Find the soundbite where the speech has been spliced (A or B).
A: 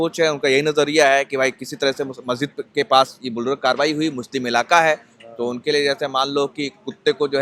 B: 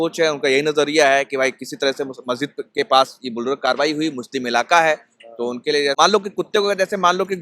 B